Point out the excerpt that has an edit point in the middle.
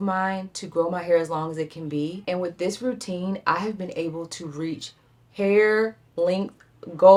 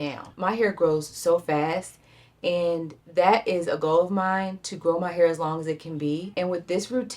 second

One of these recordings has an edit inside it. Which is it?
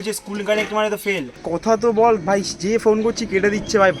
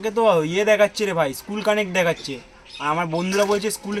first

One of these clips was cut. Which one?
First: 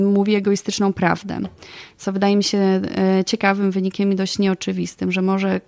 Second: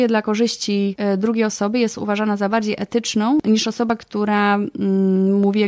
second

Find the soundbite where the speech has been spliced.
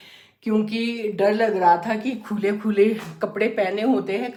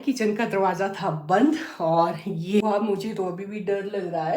second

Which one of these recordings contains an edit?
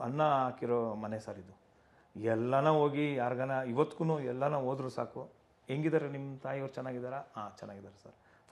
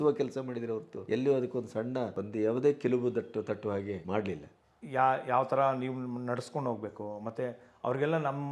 second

